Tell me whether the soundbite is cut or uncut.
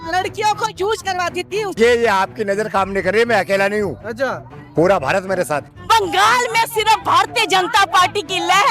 cut